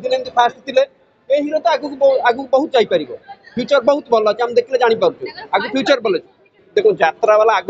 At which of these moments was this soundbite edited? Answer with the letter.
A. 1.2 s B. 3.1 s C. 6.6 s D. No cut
C